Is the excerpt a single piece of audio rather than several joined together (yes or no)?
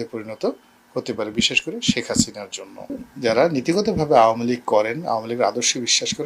no